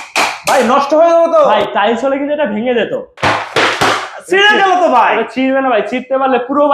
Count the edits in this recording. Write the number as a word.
one